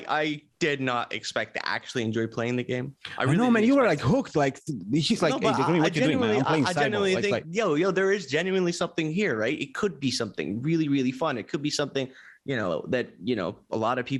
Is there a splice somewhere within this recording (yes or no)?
no